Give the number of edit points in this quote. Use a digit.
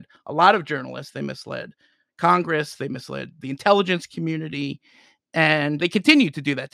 1